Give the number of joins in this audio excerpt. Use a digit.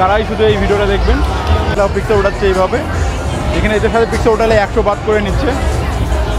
1